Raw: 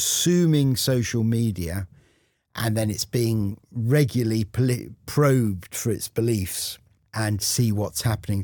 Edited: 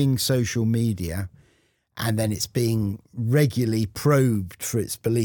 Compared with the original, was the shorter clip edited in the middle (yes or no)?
yes